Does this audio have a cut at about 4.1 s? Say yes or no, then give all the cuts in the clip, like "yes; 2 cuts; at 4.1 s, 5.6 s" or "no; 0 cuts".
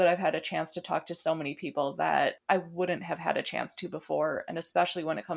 no; 1 cut; at 2.4 s